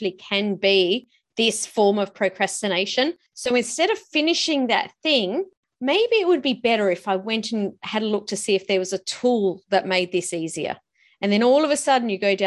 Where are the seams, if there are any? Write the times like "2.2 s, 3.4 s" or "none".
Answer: 3.3 s, 5.6 s